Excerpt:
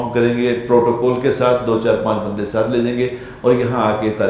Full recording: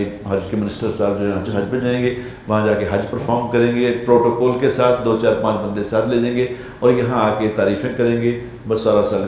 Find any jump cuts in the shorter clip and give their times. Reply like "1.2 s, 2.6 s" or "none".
none